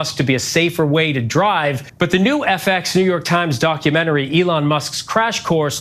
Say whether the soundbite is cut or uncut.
cut